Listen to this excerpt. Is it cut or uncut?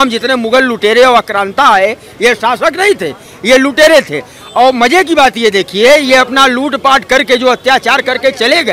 uncut